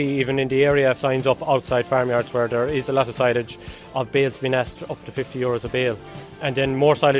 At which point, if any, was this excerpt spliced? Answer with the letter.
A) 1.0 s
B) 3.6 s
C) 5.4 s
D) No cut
A